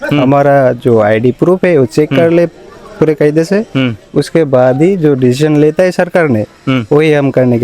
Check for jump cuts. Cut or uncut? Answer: uncut